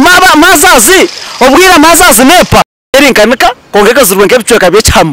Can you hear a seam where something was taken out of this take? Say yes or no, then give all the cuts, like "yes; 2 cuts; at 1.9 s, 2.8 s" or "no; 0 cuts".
yes; 1 cut; at 2.8 s